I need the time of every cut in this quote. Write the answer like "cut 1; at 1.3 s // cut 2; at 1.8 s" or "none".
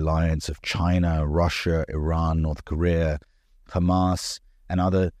none